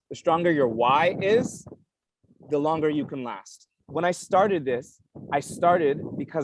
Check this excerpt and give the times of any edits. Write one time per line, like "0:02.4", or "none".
0:03.8

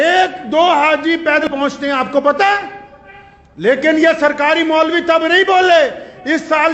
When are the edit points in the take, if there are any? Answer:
0:01.4

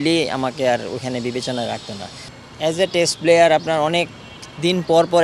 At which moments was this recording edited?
0:02.2

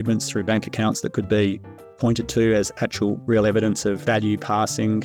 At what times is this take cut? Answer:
0:04.0

